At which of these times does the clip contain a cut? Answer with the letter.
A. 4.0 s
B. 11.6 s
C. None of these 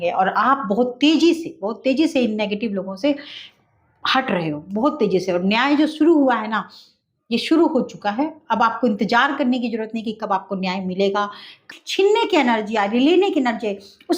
B